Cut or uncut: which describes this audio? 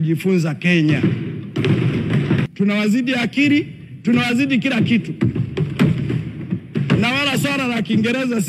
cut